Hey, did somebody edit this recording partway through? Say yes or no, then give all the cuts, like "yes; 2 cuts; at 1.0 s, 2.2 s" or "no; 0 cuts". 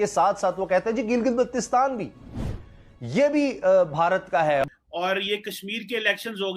yes; 1 cut; at 4.6 s